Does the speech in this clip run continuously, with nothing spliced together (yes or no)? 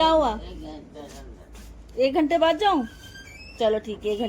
yes